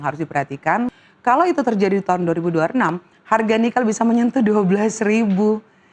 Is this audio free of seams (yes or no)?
no